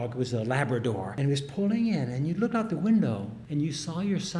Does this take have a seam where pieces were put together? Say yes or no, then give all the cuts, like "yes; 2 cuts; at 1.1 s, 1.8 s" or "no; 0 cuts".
yes; 2 cuts; at 1.1 s, 3.3 s